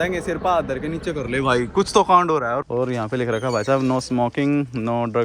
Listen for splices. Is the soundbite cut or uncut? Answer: cut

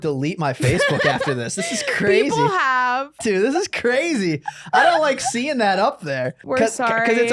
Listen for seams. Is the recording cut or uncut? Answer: cut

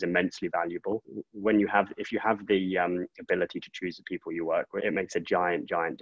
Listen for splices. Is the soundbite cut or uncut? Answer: cut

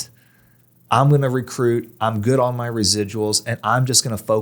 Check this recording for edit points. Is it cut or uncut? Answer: uncut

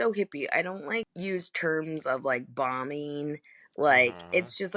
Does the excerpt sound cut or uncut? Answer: cut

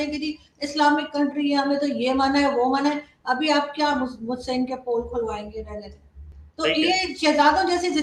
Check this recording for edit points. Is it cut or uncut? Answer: uncut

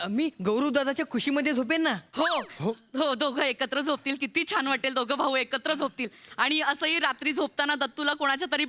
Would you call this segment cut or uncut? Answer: uncut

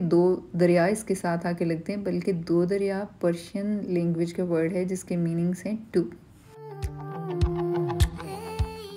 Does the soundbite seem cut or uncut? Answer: uncut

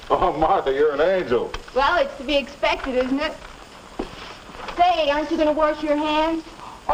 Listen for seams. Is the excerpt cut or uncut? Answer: uncut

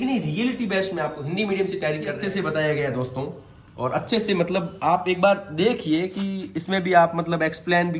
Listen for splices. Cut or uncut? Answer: cut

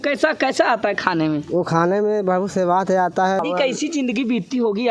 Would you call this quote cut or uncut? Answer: cut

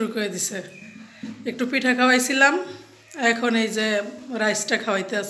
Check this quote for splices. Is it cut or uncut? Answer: uncut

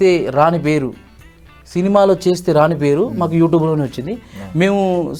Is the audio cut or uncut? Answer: uncut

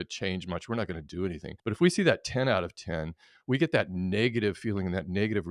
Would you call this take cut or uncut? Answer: cut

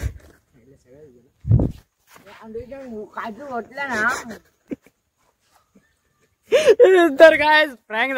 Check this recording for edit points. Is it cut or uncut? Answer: uncut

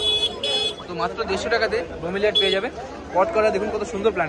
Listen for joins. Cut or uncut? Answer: uncut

